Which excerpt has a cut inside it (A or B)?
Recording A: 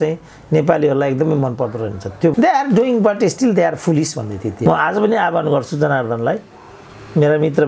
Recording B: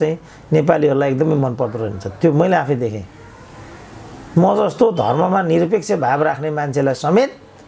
A